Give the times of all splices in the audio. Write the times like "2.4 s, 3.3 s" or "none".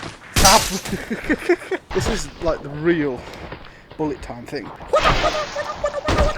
1.9 s